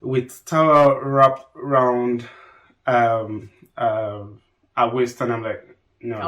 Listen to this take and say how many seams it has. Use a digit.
0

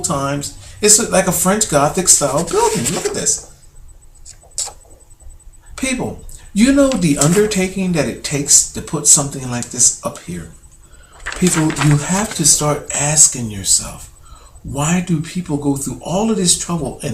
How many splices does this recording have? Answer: 1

